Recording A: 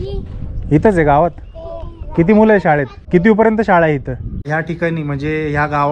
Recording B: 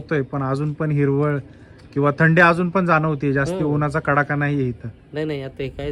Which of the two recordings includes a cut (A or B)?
A